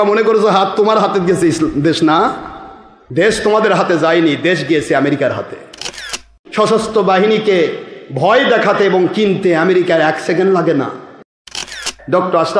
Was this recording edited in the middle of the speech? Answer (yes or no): yes